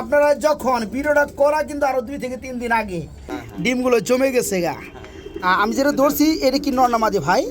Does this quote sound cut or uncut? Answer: cut